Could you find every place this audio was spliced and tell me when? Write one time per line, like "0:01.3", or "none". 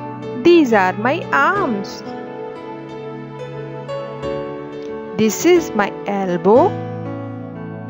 0:01.8
0:03.3
0:05.1
0:06.7